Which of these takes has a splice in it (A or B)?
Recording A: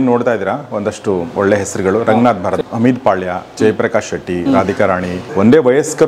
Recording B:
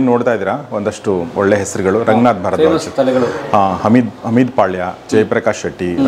A